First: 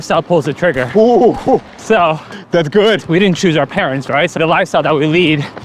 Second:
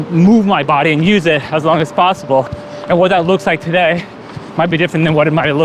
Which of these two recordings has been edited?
first; 2 cuts; at 3.0 s, 4.3 s

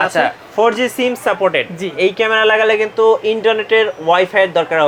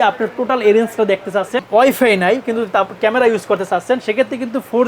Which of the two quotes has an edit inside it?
second; 1 cut; at 1.6 s

